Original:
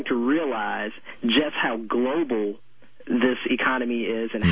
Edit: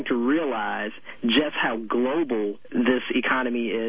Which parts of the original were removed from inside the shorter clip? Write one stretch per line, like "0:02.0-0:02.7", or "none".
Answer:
0:02.6-0:03.0